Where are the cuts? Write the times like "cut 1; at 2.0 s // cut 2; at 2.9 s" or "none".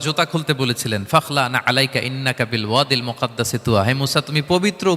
none